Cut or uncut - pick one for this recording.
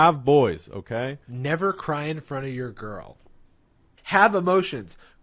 cut